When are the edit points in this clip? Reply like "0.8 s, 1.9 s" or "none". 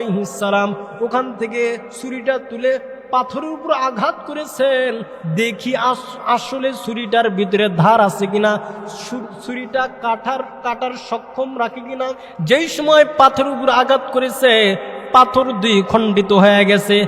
12.3 s